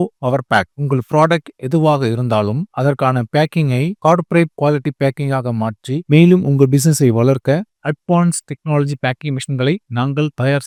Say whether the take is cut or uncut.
uncut